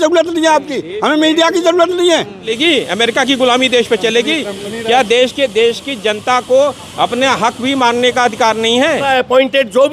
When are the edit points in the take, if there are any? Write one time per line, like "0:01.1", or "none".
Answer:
0:02.5
0:09.1

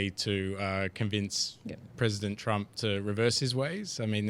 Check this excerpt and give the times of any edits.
none

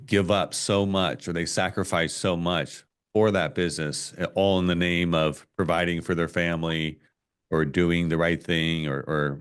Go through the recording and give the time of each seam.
none

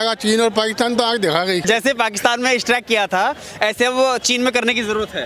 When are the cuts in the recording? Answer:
0:01.6

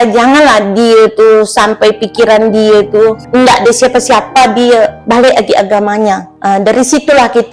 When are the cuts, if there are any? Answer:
0:03.2
0:05.0
0:06.3

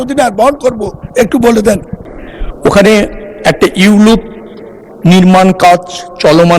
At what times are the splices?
0:02.0

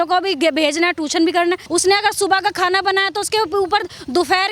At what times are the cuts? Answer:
0:01.6

